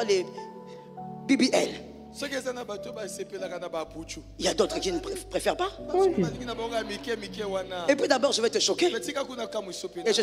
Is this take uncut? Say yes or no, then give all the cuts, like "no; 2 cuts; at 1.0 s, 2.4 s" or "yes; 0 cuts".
yes; 0 cuts